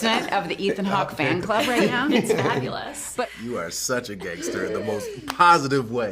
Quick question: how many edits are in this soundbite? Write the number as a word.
one